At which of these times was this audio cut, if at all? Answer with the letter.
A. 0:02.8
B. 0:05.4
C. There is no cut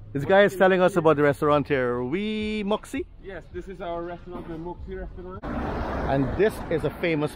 B